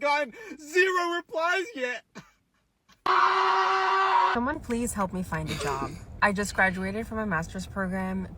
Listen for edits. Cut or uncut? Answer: cut